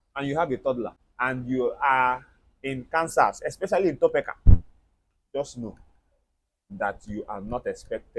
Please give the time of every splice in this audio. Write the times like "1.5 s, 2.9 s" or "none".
1.0 s